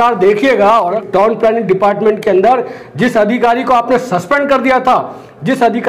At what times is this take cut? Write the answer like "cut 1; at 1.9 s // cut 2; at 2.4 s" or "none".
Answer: cut 1; at 1.0 s